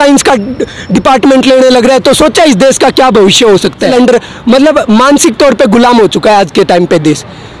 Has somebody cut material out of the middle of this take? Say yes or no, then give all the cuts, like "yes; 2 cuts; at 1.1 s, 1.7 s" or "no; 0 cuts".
yes; 1 cut; at 3.9 s